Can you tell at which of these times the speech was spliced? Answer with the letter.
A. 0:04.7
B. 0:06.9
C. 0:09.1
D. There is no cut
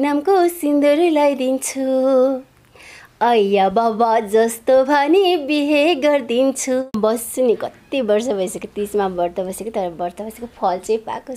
B